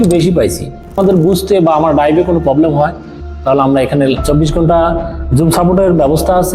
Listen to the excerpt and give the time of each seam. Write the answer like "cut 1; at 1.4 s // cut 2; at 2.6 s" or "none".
cut 1; at 1.0 s // cut 2; at 4.2 s